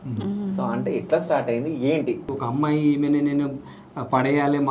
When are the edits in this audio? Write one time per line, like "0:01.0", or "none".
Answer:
0:02.3